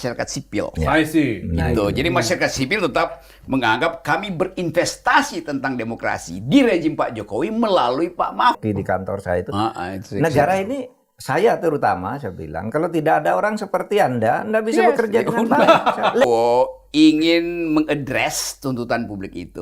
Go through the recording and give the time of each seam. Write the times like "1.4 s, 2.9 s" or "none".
8.6 s, 16.2 s

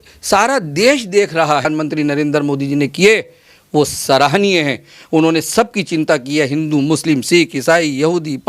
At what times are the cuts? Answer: 1.6 s

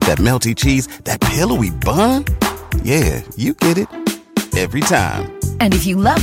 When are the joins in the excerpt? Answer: none

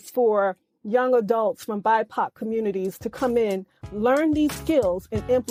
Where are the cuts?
none

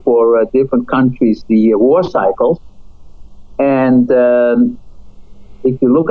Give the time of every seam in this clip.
none

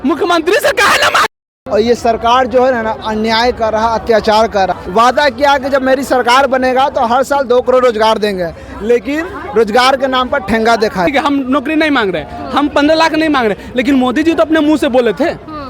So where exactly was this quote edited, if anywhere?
1.5 s, 4.7 s, 11.1 s

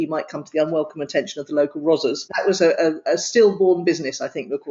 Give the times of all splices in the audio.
2.3 s

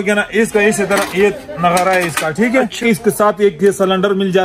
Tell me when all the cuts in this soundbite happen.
2.8 s

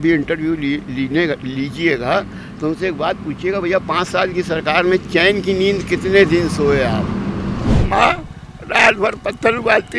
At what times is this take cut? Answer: 7.7 s

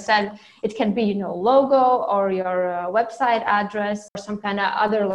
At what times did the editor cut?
4.2 s

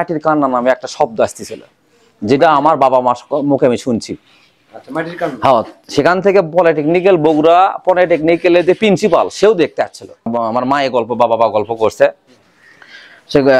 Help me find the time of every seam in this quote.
10.1 s

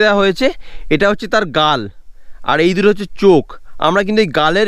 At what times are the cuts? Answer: none

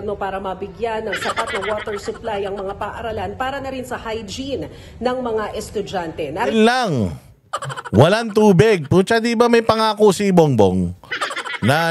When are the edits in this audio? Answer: none

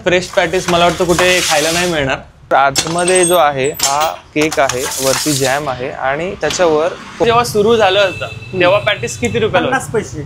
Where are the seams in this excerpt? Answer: 2.4 s, 7.2 s

